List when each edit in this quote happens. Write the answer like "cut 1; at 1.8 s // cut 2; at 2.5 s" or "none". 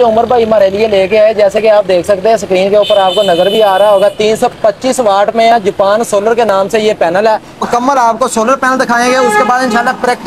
cut 1; at 7.6 s